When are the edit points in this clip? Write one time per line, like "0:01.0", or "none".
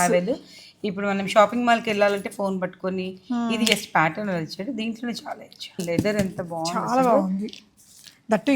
0:05.8